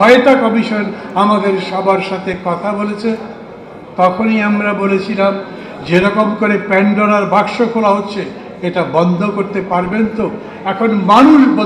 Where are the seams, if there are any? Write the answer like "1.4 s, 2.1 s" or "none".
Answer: none